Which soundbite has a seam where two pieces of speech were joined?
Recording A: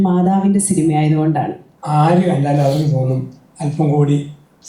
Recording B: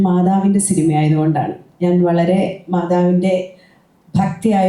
A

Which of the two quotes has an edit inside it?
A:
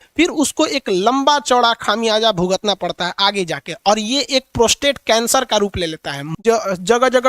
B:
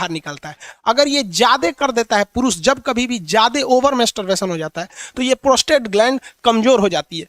A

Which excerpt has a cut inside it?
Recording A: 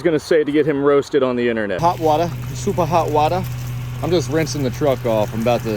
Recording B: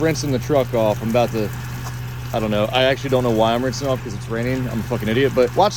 A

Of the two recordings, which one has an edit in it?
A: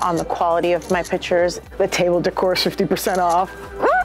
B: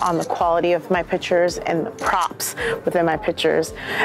A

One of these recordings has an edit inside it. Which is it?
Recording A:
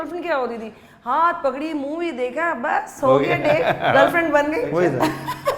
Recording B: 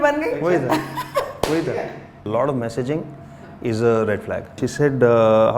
B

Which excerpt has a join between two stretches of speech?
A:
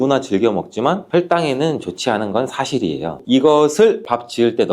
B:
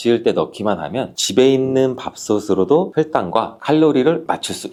A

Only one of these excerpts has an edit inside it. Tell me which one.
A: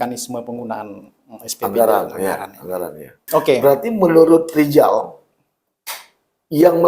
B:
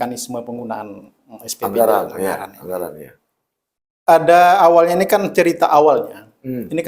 A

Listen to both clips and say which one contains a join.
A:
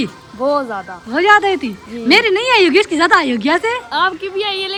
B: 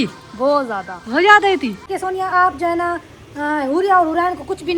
B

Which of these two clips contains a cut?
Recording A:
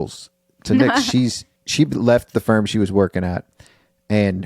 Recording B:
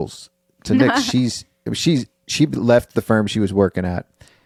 A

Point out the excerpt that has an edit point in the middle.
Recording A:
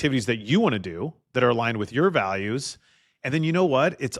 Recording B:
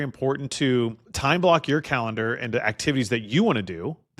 B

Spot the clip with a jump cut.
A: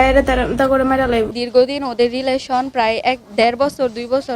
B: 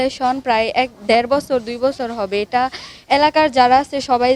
A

